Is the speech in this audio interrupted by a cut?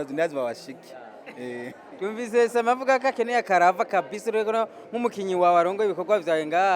no; 0 cuts

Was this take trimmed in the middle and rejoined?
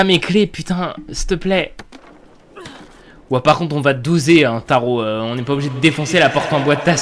no; 0 cuts

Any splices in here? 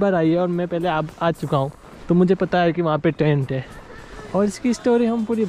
no; 0 cuts

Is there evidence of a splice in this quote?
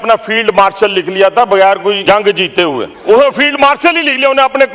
yes; 2 cuts; at 2.0 s, 2.9 s

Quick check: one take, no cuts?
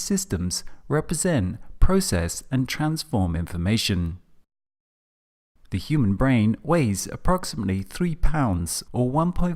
no; 1 cut; at 1.3 s

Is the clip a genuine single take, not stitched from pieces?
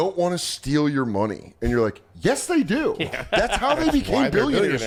yes; 0 cuts

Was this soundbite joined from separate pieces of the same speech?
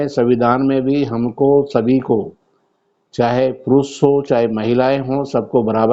no; 0 cuts

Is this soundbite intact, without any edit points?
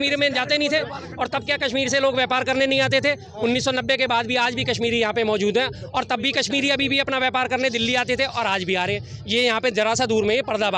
yes; 0 cuts

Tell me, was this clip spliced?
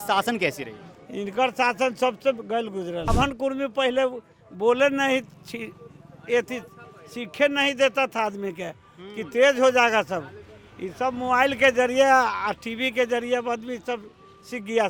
yes; 1 cut; at 3.1 s

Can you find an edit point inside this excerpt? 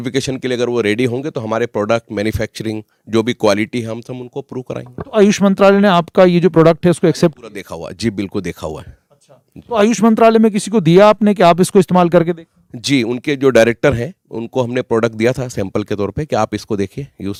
no; 0 cuts

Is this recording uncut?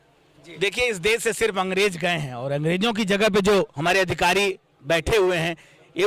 yes; 0 cuts

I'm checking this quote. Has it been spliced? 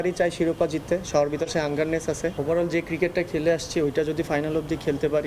yes; 1 cut; at 2.4 s

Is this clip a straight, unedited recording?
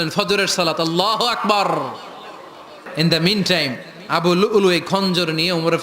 no; 1 cut; at 2.9 s

